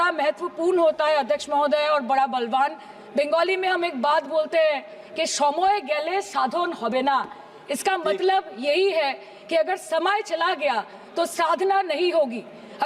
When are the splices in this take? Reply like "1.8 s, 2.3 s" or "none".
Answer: none